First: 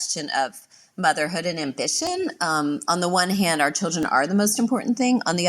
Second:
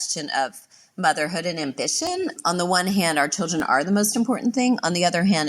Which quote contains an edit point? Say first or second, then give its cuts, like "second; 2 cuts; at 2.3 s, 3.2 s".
second; 1 cut; at 2.4 s